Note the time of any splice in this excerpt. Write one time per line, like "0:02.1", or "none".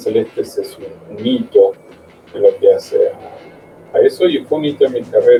none